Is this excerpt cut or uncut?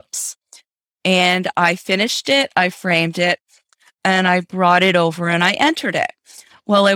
uncut